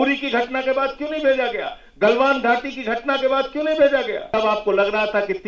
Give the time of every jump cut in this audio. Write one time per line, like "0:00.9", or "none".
0:04.3

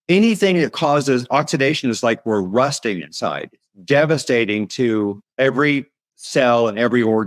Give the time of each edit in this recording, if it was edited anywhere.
0:05.2

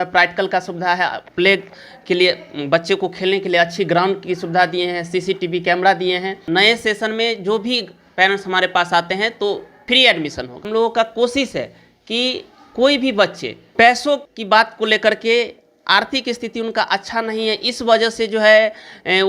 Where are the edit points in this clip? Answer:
0:06.4
0:09.7
0:10.6

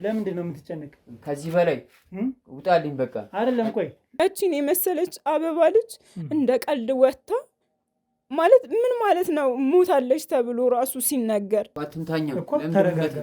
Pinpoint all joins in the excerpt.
0:04.2
0:11.8

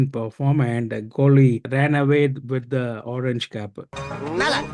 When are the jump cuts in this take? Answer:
0:01.7

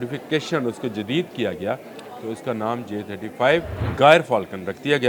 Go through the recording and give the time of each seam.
0:03.8

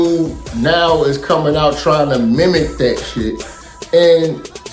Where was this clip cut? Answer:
none

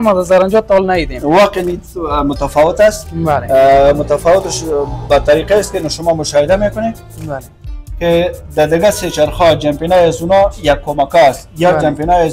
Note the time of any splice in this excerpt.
none

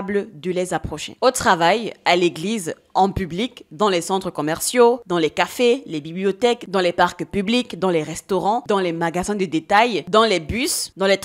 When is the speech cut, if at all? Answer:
none

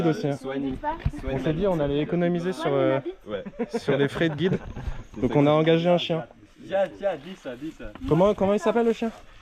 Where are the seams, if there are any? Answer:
none

